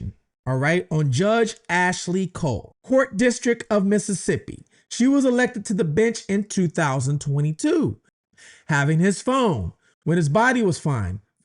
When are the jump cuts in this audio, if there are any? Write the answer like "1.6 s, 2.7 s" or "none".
2.7 s, 8.1 s